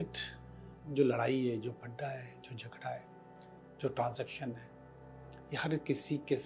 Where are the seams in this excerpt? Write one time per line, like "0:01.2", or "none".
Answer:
none